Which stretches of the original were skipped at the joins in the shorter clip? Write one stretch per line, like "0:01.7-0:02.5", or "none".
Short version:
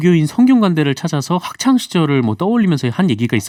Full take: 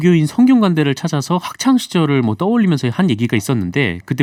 none